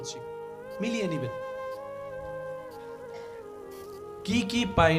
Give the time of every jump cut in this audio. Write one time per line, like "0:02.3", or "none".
none